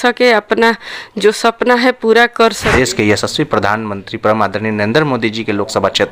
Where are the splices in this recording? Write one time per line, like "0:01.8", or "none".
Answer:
0:02.7